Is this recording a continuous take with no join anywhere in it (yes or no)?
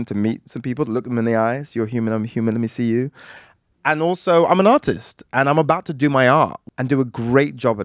no